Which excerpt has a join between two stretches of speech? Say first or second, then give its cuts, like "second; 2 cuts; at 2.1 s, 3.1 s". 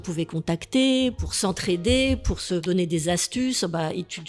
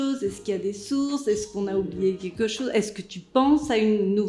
first; 2 cuts; at 1.2 s, 2.6 s